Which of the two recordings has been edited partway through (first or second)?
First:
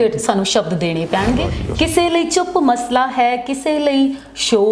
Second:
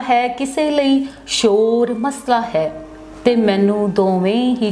first